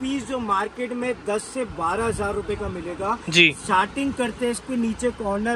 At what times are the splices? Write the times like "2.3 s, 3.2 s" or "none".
none